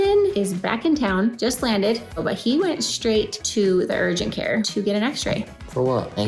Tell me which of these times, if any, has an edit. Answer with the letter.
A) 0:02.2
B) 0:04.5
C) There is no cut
A